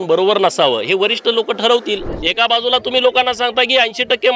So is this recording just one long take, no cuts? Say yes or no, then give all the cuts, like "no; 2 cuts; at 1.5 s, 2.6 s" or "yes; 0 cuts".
no; 1 cut; at 2.1 s